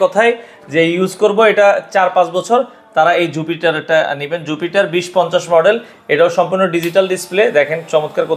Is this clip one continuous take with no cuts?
yes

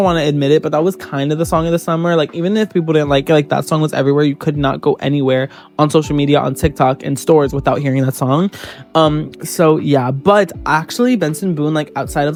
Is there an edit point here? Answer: no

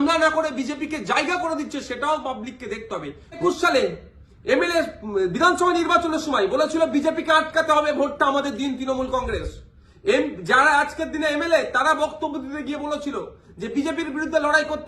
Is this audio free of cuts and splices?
no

